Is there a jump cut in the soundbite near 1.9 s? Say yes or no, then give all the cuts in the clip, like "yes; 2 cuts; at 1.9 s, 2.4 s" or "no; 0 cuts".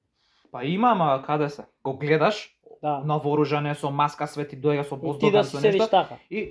yes; 1 cut; at 1.9 s